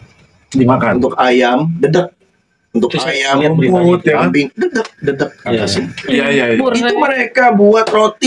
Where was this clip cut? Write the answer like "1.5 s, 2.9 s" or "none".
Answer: none